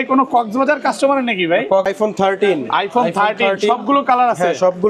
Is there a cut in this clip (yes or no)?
yes